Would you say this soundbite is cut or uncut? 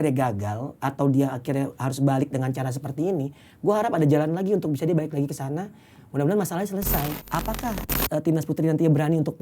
cut